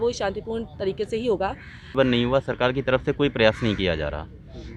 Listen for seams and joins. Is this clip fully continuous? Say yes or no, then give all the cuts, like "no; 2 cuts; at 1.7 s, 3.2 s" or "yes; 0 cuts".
no; 1 cut; at 1.9 s